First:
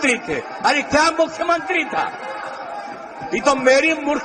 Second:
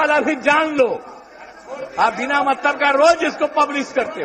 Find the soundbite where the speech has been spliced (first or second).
second